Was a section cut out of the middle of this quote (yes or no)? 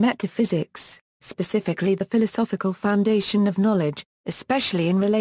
no